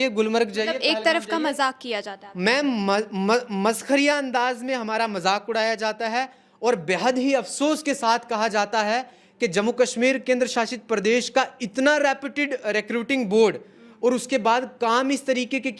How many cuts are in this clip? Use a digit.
0